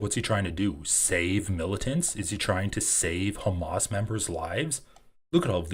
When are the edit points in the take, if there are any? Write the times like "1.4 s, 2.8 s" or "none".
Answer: none